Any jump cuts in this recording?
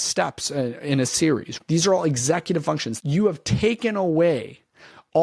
yes; 2 cuts; at 1.5 s, 2.9 s

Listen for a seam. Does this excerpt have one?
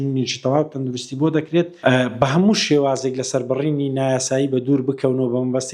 yes; 1 cut; at 1.7 s

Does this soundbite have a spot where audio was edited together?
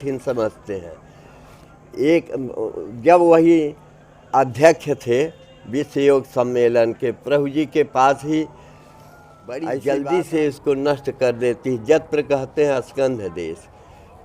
yes; 1 cut; at 9.6 s

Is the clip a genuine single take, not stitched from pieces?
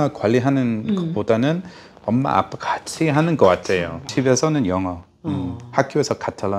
no; 1 cut; at 4.1 s

